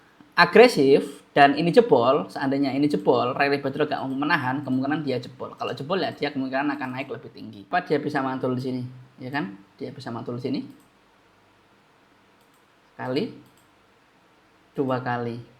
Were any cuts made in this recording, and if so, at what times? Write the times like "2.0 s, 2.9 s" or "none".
7.7 s